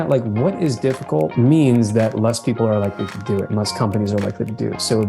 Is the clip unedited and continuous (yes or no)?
no